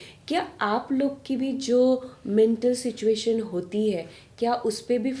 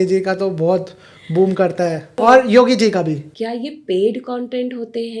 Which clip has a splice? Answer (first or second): second